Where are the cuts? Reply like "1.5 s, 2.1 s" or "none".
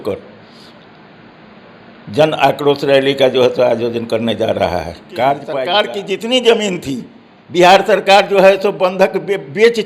5.5 s